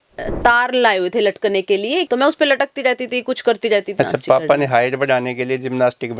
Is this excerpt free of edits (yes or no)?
no